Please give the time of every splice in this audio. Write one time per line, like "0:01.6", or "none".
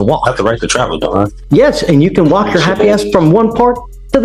0:01.4

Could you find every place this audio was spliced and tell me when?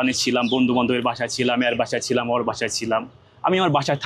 none

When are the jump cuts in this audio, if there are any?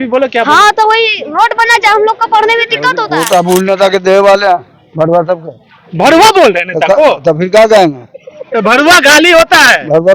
0:03.0

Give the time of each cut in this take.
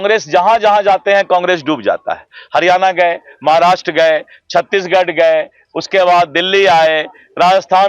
none

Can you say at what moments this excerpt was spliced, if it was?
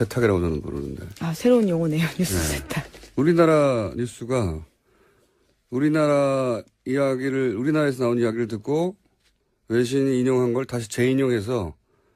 none

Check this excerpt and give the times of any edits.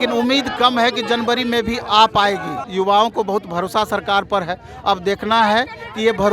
0:02.6

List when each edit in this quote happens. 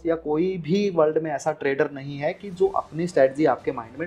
none

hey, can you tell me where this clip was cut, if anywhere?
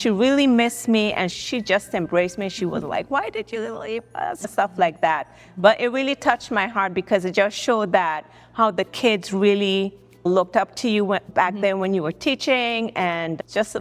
none

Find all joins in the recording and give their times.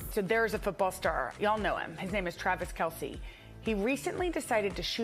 none

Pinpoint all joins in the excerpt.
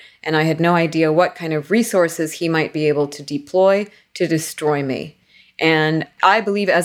none

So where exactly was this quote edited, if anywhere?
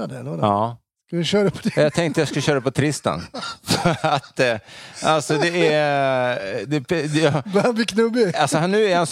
none

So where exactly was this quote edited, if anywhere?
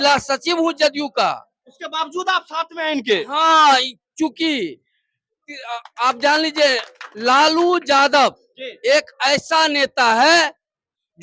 none

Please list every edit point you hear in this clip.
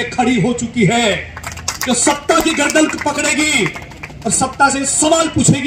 none

